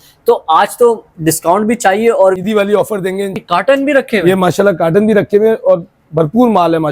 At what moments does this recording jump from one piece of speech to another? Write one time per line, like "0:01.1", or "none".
0:02.4
0:03.4